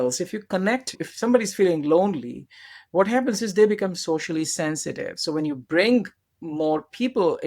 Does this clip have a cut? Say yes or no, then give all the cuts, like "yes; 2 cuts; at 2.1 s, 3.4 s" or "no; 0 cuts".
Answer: yes; 1 cut; at 1.0 s